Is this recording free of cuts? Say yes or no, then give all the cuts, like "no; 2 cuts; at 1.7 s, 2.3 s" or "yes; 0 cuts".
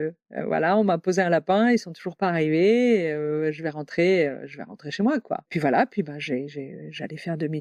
yes; 0 cuts